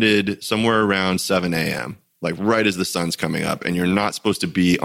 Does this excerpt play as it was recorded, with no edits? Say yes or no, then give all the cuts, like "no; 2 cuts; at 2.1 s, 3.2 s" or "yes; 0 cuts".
yes; 0 cuts